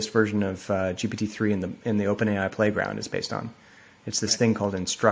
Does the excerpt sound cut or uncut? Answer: uncut